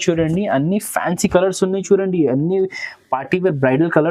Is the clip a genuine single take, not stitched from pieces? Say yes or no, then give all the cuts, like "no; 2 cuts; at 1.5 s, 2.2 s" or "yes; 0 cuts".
yes; 0 cuts